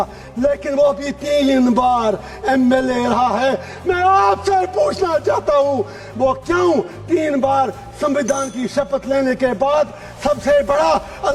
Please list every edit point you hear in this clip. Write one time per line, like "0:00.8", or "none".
none